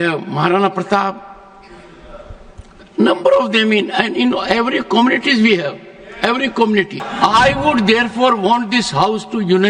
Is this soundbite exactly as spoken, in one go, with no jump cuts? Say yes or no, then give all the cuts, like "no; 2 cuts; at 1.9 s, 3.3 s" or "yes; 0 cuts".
no; 1 cut; at 7.0 s